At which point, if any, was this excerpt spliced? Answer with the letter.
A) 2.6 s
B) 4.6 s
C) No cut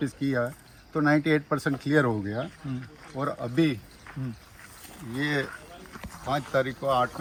C